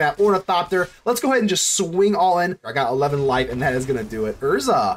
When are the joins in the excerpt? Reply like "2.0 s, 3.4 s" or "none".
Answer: 2.7 s

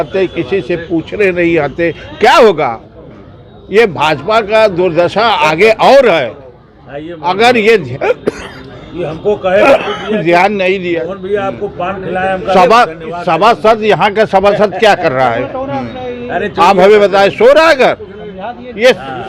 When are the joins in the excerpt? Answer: none

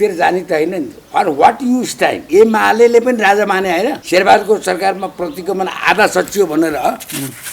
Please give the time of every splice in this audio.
2.2 s, 4.0 s

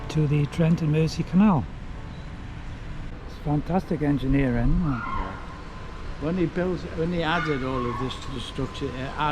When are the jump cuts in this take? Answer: 3.2 s

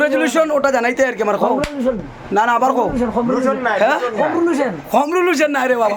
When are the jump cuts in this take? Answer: none

